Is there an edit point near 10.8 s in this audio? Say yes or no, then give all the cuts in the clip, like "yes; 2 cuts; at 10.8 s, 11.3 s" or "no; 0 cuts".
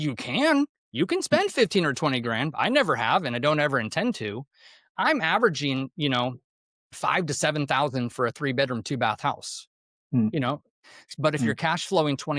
yes; 1 cut; at 10.8 s